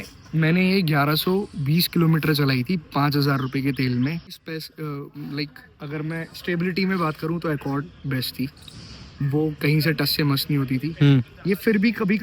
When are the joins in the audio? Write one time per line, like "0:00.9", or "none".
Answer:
0:04.4